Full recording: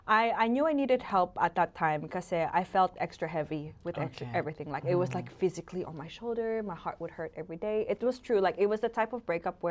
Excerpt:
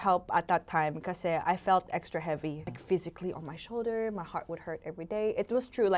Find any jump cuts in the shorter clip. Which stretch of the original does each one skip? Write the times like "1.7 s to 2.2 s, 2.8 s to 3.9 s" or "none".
3.8 s to 5.2 s